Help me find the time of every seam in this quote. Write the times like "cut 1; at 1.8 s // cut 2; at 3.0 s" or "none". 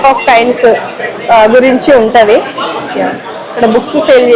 none